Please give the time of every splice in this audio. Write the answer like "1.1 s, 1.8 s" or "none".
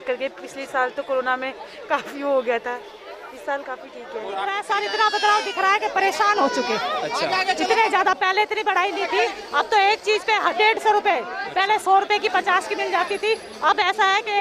4.5 s